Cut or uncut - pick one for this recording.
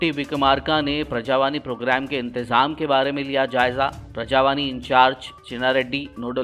uncut